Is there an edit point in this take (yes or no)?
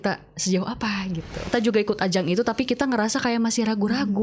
yes